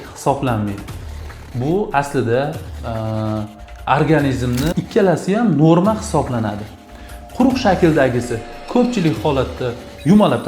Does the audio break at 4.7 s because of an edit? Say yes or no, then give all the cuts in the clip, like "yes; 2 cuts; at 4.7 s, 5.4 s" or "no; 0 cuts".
yes; 1 cut; at 4.7 s